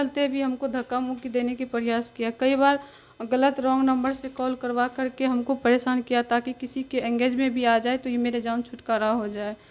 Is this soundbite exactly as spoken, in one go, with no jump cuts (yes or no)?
yes